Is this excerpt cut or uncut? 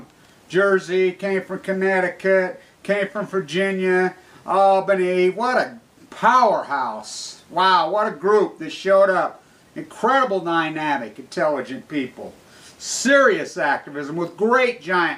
cut